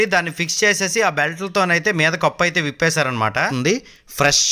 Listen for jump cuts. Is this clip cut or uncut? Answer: cut